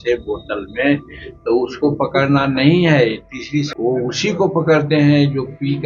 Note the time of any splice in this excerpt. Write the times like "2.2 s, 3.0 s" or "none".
3.7 s